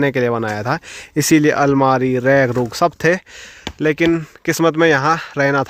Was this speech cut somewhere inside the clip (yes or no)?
no